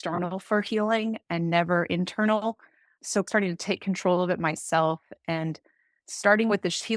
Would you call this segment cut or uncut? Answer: cut